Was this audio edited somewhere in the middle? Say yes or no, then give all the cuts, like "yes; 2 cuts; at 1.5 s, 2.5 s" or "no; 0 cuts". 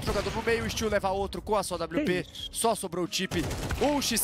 no; 0 cuts